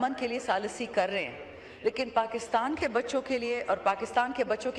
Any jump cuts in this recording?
no; 0 cuts

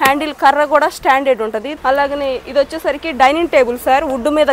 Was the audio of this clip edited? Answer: yes; 1 cut; at 1.7 s

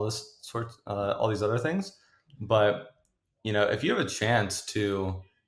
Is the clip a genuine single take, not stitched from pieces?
yes; 0 cuts

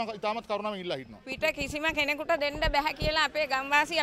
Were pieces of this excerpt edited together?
yes; 1 cut; at 1.2 s

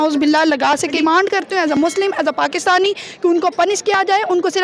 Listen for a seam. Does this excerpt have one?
yes; 1 cut; at 0.9 s

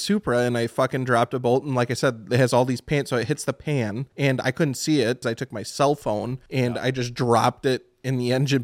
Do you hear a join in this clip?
yes; 3 cuts; at 4.0 s, 5.2 s, 6.4 s

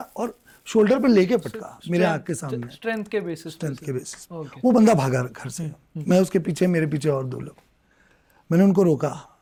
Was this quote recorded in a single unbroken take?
yes; 0 cuts

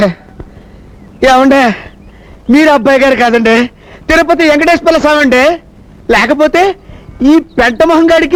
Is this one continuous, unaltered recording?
yes; 0 cuts

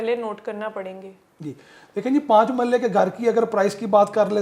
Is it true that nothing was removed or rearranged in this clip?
yes; 0 cuts

